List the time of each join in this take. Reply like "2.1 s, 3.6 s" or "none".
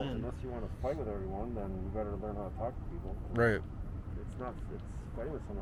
none